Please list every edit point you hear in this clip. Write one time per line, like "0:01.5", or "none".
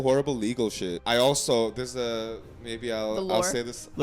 0:00.9